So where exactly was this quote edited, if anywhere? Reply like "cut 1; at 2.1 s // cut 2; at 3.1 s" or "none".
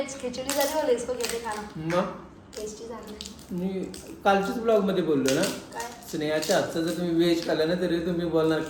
none